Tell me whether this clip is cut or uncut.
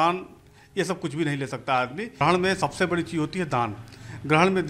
cut